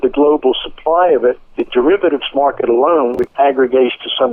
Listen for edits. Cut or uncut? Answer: cut